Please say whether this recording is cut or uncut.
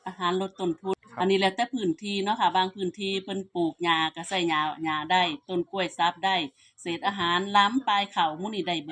cut